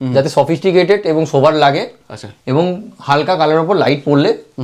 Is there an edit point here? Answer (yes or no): no